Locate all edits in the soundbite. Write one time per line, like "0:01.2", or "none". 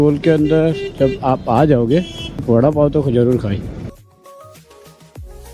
0:02.4
0:03.9